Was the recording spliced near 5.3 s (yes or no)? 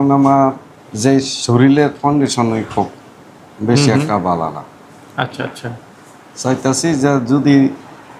no